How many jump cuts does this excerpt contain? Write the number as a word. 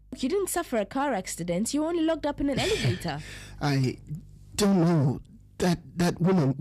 one